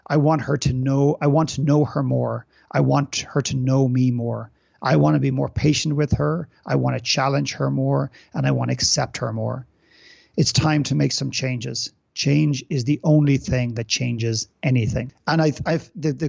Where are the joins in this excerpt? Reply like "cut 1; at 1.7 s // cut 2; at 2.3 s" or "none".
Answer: cut 1; at 15.1 s